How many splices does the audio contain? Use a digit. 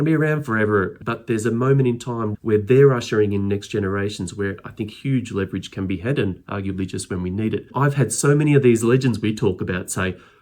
3